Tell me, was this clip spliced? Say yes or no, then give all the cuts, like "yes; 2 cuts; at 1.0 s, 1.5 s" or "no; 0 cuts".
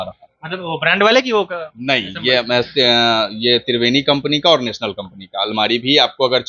no; 0 cuts